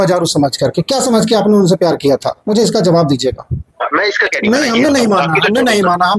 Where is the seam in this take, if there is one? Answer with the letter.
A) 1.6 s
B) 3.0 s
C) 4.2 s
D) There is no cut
C